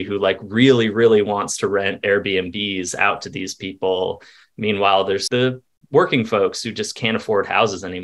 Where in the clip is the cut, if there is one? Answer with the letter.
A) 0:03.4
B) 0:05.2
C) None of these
B